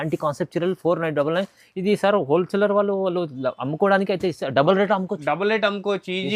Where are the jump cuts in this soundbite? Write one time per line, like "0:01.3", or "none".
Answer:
none